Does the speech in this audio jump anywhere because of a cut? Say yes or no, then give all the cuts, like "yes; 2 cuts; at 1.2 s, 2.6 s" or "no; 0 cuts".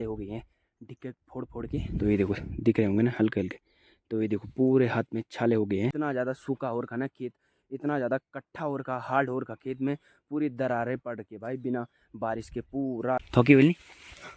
yes; 2 cuts; at 5.9 s, 13.3 s